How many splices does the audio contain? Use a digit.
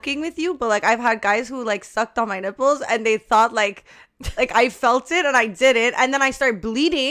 0